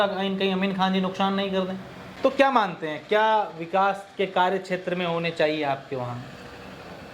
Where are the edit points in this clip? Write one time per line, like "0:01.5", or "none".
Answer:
0:02.1